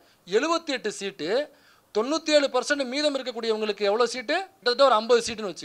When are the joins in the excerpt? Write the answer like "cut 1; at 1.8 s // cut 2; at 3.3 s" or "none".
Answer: cut 1; at 4.5 s